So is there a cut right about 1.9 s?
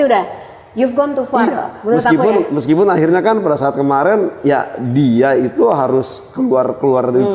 no; 0 cuts

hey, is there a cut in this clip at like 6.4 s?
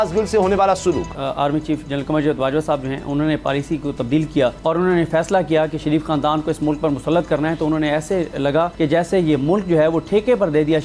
no; 3 cuts; at 1.2 s, 4.6 s, 8.7 s

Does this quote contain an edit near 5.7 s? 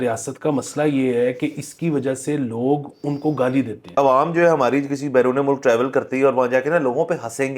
no; 1 cut; at 4.0 s

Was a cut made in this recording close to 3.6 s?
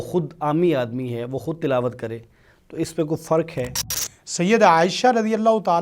yes; 1 cut; at 3.6 s

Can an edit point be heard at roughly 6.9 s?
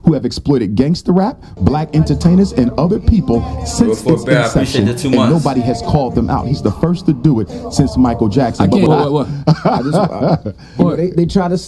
no; 1 cut; at 8.9 s

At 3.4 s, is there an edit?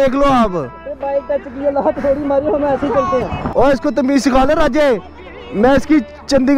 yes; 1 cut; at 3.4 s

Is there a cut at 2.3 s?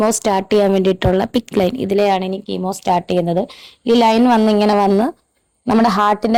no; 0 cuts

